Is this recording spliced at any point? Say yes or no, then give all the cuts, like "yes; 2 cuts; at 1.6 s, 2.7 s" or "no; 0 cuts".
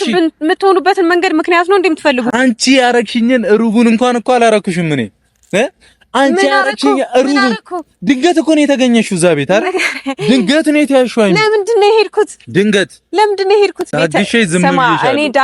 yes; 2 cuts; at 2.3 s, 13.9 s